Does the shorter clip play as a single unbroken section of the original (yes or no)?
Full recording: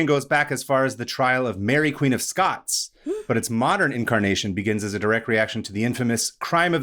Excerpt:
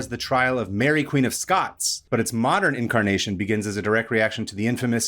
no